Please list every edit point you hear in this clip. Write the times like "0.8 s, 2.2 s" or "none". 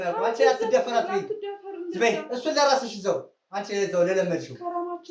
none